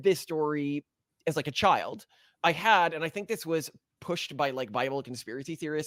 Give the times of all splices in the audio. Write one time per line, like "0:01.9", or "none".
none